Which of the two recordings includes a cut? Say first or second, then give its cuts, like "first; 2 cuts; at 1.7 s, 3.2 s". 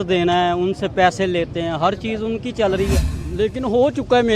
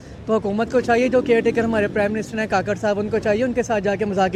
first; 1 cut; at 3.2 s